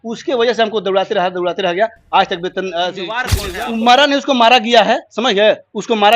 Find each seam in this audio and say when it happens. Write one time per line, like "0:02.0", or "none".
0:03.3